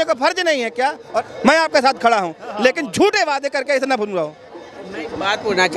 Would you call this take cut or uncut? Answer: uncut